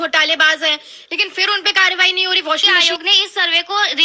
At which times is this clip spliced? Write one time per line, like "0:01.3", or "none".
0:02.7